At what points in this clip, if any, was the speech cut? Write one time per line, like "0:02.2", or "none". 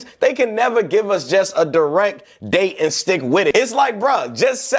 0:03.5